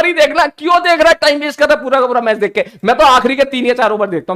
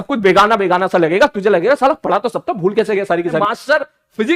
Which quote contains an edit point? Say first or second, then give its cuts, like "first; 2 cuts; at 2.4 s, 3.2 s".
second; 1 cut; at 3.4 s